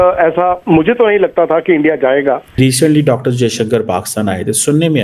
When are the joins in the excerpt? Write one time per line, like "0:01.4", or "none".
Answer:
0:02.6